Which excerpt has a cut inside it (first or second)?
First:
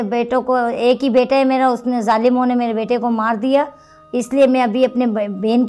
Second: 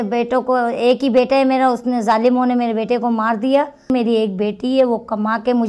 second